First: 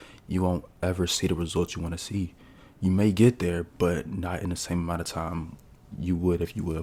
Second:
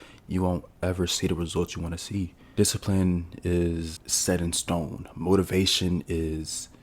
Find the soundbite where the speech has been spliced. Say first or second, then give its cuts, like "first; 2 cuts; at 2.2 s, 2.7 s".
second; 2 cuts; at 2.4 s, 4.0 s